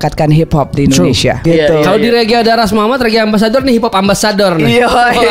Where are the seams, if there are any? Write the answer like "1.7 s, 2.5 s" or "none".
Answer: 1.4 s